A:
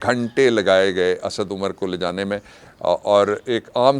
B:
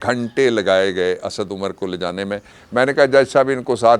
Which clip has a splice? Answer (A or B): B